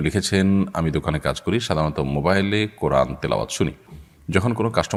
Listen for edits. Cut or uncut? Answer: uncut